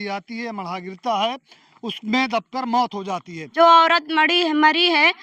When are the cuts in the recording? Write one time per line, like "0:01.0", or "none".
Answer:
0:03.4

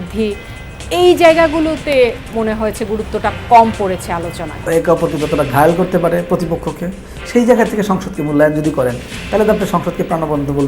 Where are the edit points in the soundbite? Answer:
0:04.6

